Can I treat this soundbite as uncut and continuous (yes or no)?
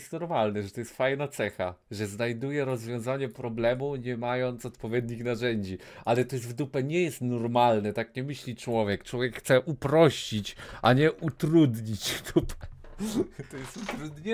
yes